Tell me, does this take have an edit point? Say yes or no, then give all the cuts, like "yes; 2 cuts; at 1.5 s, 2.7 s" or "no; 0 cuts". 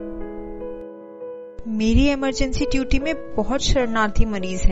yes; 1 cut; at 1.6 s